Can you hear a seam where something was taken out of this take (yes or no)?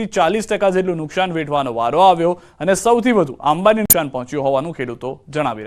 no